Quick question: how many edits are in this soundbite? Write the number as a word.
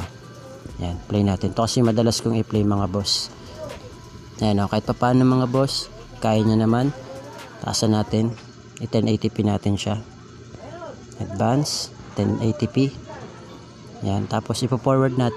one